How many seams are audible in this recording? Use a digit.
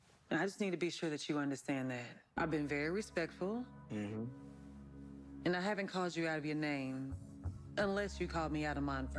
1